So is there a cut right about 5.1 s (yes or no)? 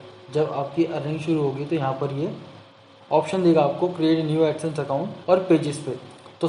yes